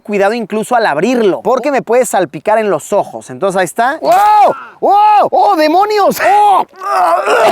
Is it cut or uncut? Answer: cut